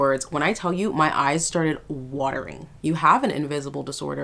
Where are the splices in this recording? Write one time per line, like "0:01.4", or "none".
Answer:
0:02.7